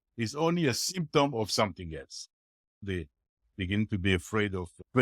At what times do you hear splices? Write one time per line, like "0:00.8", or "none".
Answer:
0:02.8